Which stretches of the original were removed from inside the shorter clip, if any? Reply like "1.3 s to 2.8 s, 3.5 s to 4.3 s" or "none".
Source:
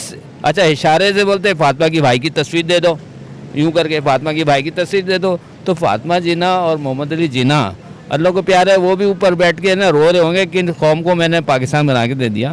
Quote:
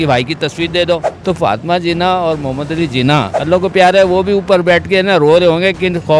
3.1 s to 5.5 s, 7.8 s to 8.1 s